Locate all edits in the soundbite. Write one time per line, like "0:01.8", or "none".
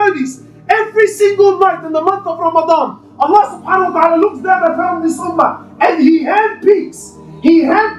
none